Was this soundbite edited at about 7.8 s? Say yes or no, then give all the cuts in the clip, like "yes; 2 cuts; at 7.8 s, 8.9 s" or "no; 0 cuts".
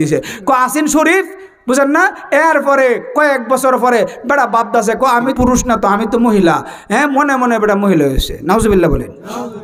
no; 1 cut; at 5.3 s